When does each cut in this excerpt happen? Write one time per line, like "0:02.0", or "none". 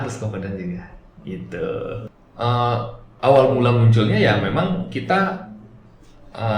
0:02.1